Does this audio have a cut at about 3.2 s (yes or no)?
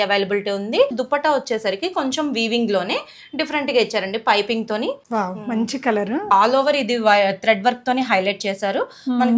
no